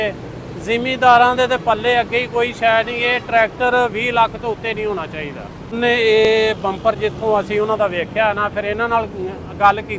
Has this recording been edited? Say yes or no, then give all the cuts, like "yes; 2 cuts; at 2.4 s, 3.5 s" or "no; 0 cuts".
yes; 1 cut; at 5.8 s